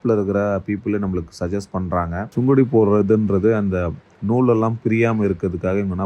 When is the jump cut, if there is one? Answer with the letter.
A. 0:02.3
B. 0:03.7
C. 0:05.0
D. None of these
A